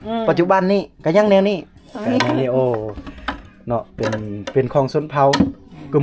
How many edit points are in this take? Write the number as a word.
zero